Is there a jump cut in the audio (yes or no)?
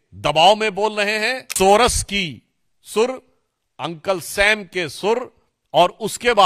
yes